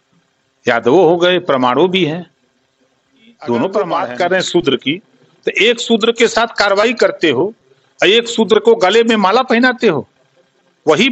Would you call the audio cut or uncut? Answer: cut